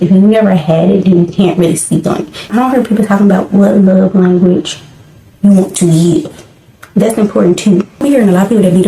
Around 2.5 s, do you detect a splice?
yes; 2 cuts; at 2.5 s, 8.0 s

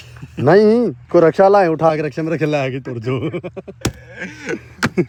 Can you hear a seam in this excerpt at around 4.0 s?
no; 0 cuts

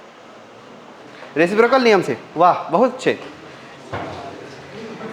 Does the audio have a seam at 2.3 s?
no; 1 cut; at 1.1 s

